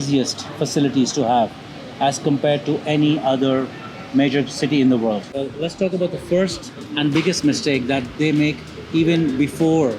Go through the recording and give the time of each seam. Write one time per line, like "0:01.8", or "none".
0:05.3